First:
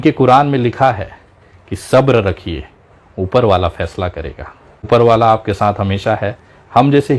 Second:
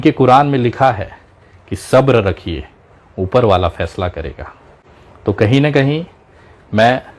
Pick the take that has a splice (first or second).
first